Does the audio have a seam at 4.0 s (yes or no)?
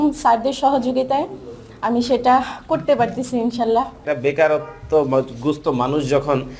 yes